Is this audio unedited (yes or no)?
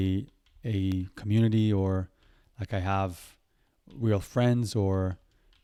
yes